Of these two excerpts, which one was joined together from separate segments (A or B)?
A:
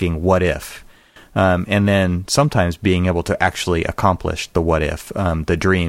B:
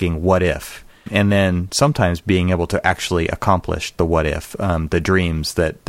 B